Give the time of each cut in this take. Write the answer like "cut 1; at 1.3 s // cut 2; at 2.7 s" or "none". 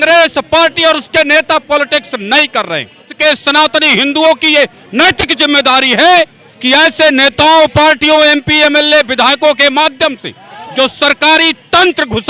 cut 1; at 3.1 s